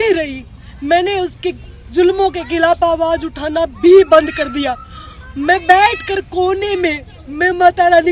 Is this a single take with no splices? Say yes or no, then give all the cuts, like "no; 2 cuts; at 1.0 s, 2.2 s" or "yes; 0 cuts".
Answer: yes; 0 cuts